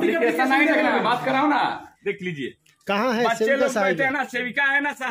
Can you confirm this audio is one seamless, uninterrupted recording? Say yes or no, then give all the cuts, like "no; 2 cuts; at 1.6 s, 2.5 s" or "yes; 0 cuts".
no; 1 cut; at 1.9 s